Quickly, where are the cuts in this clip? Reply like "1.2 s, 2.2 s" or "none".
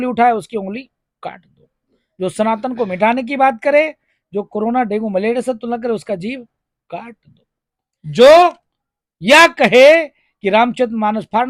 none